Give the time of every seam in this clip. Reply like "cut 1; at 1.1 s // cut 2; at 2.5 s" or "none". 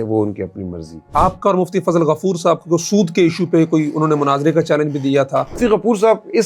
cut 1; at 1.1 s // cut 2; at 5.6 s